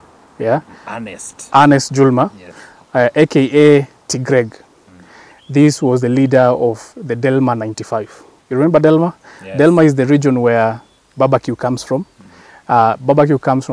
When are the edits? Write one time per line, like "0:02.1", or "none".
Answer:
none